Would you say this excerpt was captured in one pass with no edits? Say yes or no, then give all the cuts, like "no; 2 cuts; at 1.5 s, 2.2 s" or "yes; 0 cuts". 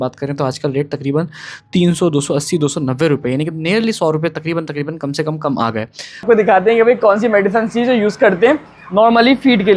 no; 1 cut; at 6.2 s